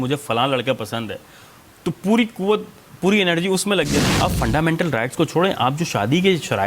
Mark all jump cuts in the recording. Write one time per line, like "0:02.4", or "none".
0:04.0